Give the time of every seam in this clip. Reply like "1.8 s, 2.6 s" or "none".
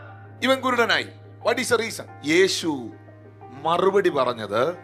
2.1 s